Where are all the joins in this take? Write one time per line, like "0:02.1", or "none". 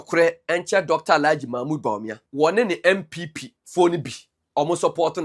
0:02.2